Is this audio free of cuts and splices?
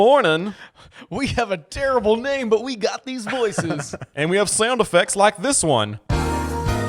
no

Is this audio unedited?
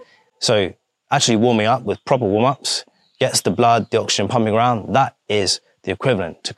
yes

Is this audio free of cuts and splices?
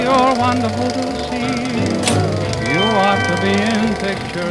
yes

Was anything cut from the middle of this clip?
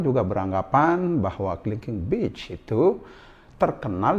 no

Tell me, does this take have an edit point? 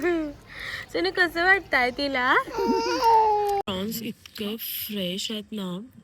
yes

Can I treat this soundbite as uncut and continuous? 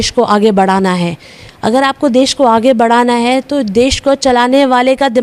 yes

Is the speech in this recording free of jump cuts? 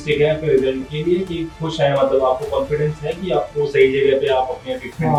yes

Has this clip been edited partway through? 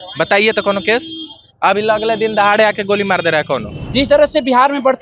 yes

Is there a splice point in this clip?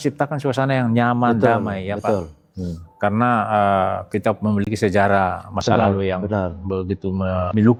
no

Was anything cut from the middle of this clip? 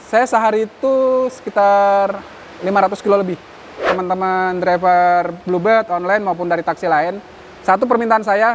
yes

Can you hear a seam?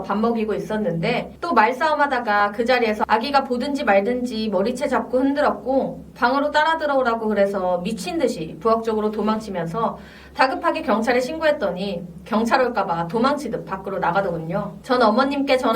yes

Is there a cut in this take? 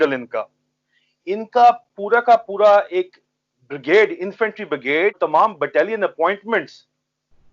yes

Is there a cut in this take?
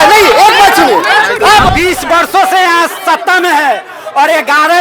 yes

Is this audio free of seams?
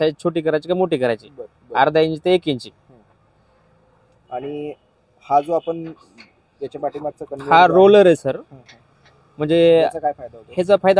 yes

